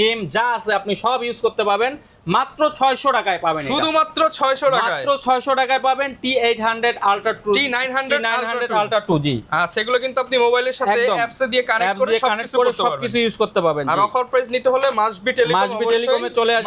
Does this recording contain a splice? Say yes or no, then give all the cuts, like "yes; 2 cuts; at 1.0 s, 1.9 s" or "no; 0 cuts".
no; 0 cuts